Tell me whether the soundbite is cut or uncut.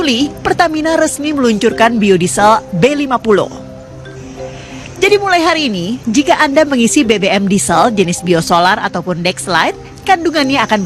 uncut